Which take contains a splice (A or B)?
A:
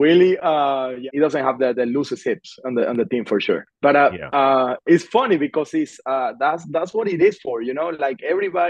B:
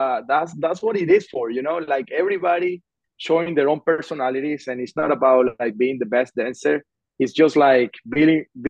A